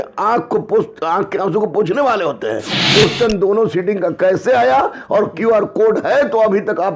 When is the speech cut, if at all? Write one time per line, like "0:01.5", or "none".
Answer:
0:02.8